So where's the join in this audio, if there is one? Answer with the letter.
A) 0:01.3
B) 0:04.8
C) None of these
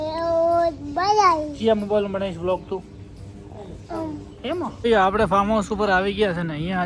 B